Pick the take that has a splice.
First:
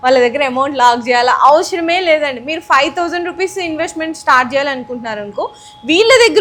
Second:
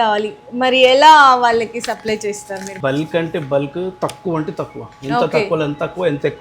second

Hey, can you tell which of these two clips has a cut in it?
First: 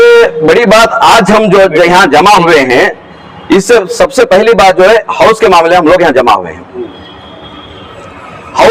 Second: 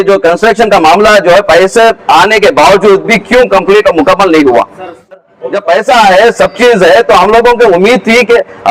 second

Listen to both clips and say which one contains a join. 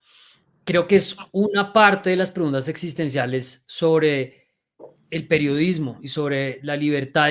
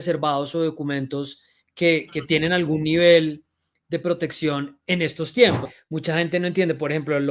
second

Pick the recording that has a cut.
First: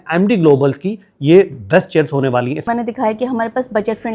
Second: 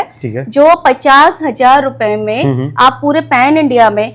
first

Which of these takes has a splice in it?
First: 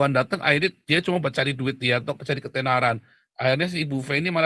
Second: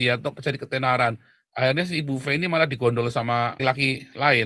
second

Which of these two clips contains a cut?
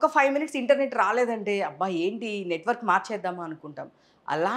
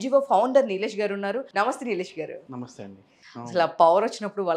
second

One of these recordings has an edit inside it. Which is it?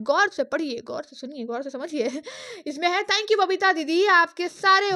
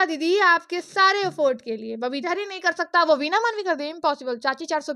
second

